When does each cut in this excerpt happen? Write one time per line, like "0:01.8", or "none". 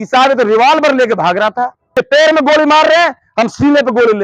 0:01.8

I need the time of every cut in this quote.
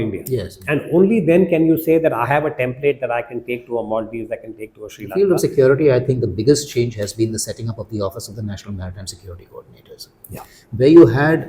0:05.1

